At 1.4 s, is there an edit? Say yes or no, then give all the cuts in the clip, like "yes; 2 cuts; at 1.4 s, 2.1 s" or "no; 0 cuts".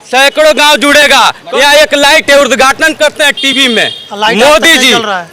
yes; 1 cut; at 1.4 s